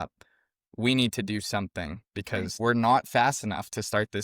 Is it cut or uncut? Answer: cut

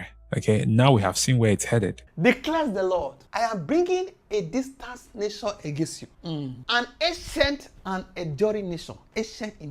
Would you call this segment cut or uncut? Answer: cut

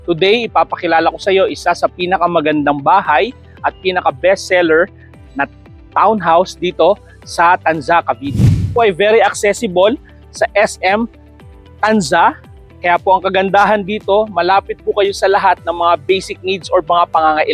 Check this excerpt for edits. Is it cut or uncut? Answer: cut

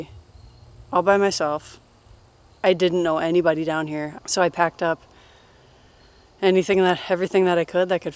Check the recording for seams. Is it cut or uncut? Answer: cut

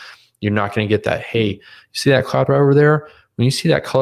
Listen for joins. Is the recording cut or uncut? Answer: uncut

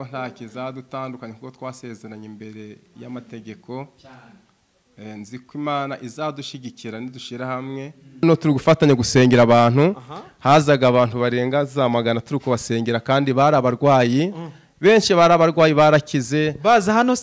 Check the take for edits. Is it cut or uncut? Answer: cut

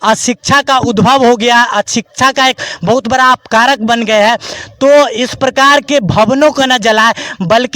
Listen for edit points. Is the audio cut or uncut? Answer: uncut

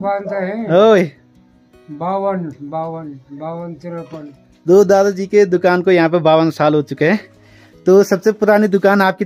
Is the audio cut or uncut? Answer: uncut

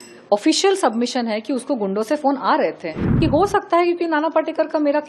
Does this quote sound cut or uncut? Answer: cut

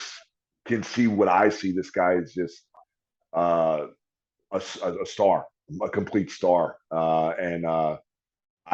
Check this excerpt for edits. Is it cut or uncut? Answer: uncut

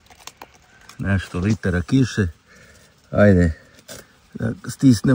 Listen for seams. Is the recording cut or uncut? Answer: uncut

